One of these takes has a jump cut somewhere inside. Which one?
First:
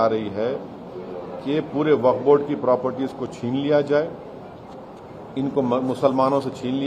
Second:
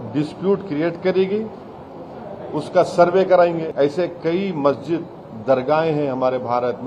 second; 1 cut; at 3.7 s

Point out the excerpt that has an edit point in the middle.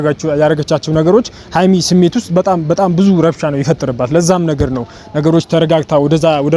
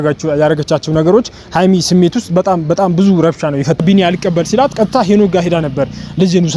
second; 1 cut; at 3.8 s

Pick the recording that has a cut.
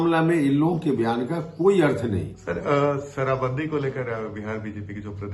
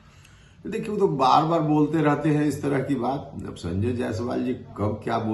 first; 1 cut; at 2.4 s

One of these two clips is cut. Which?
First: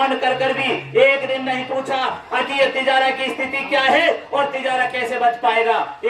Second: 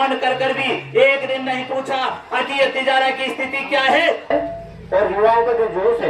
second; 1 cut; at 4.3 s

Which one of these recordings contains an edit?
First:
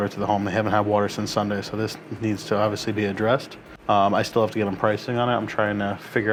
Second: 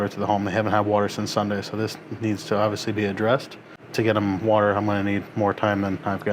second; 1 cut; at 3.7 s

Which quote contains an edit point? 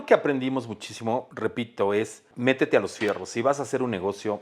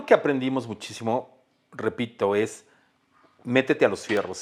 first; 2 cuts; at 1.3 s, 2.2 s

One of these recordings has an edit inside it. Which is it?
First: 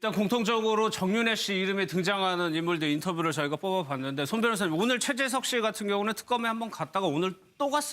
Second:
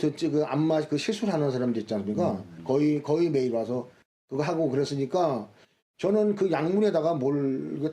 first; 1 cut; at 2.7 s

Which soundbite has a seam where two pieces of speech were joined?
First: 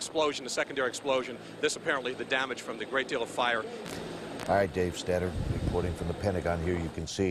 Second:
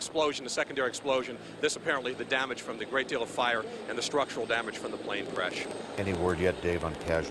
second; 1 cut; at 3.9 s

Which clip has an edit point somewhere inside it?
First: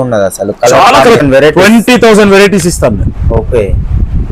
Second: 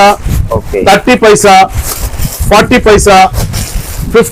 first; 1 cut; at 1.2 s

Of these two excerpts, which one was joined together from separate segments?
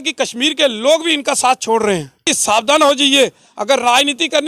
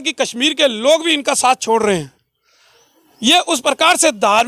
first; 1 cut; at 2.3 s

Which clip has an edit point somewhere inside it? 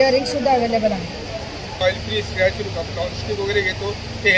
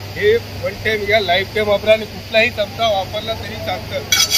first; 1 cut; at 1.8 s

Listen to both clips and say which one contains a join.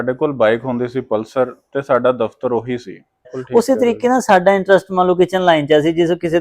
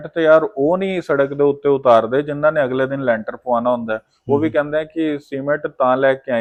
first; 1 cut; at 3.4 s

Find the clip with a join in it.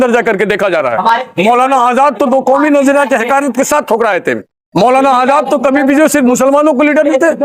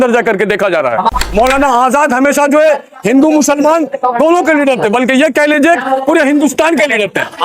second; 1 cut; at 1.1 s

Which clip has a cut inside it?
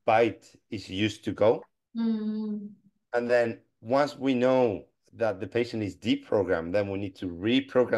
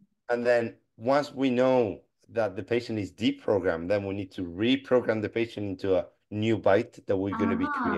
first; 1 cut; at 1.8 s

